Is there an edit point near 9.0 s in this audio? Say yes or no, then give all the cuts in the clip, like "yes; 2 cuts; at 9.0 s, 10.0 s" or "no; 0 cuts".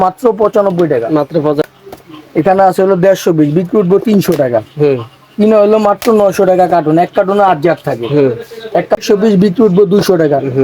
yes; 2 cuts; at 1.6 s, 9.0 s